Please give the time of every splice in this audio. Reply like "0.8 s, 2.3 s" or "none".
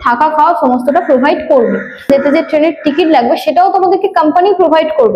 2.1 s